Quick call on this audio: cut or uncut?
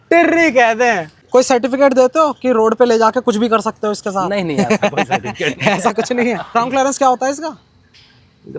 cut